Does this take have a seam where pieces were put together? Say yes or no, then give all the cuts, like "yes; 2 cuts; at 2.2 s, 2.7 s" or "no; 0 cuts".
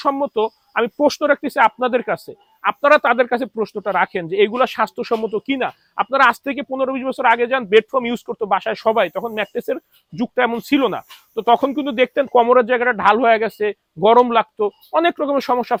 no; 0 cuts